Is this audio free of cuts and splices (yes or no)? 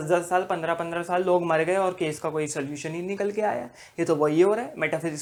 yes